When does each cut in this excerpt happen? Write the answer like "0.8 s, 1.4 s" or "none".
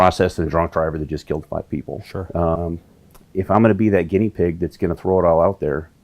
2.6 s